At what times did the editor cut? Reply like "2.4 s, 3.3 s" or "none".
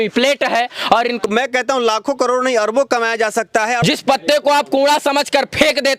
1.2 s, 3.8 s

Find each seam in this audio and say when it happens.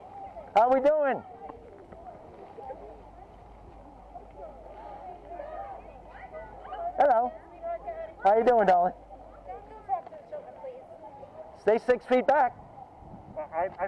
11.5 s

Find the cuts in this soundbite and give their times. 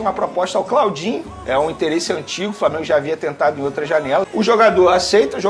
4.3 s

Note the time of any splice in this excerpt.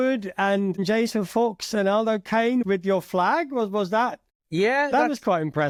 none

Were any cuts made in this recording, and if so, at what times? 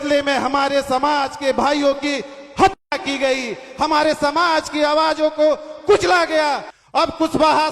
6.7 s

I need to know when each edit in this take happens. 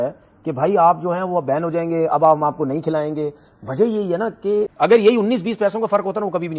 4.7 s

